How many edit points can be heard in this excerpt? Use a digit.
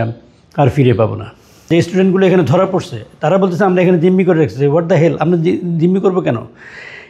1